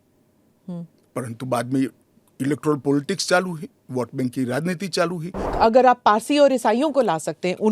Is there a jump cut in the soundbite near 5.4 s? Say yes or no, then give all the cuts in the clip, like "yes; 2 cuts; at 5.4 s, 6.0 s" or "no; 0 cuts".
yes; 1 cut; at 5.4 s